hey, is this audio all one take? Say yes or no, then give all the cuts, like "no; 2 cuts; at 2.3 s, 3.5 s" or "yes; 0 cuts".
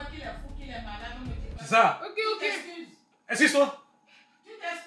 yes; 0 cuts